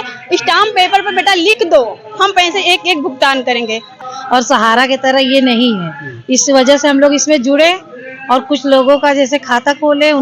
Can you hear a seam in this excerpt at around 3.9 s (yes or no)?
yes